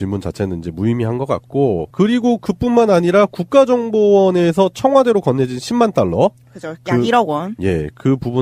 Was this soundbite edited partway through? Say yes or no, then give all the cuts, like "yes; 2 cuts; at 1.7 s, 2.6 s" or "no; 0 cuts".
no; 0 cuts